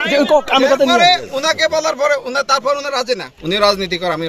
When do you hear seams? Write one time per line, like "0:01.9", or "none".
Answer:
0:03.3

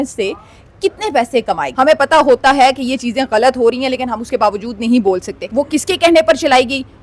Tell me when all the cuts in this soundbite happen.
0:01.7
0:05.4

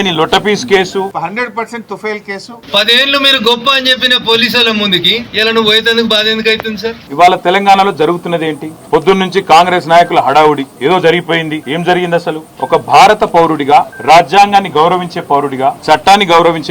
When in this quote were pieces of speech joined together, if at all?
0:01.1
0:02.5
0:07.0

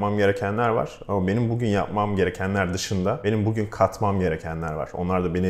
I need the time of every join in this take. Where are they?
0:03.2

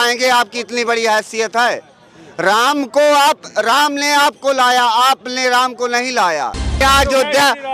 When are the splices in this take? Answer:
0:06.8

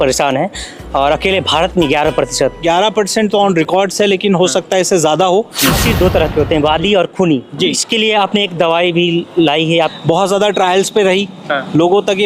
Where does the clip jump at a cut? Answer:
0:02.6
0:05.8
0:07.8
0:10.0

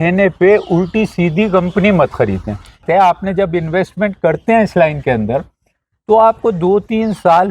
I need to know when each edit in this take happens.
0:02.8

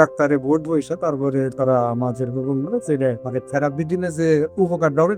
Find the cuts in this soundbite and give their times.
0:03.2

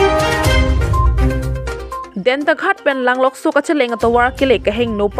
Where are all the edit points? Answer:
0:00.8
0:02.1

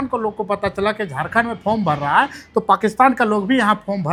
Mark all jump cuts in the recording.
none

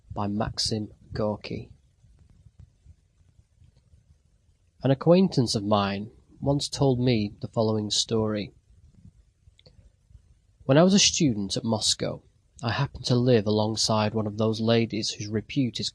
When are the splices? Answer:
0:06.1

